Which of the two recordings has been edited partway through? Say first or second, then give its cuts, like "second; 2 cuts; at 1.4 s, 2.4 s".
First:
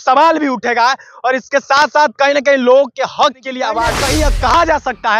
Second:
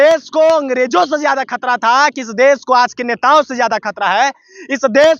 first; 1 cut; at 3.9 s